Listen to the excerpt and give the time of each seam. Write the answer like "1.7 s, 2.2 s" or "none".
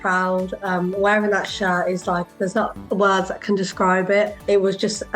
2.8 s, 4.4 s